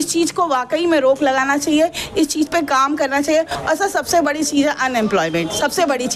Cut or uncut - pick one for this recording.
uncut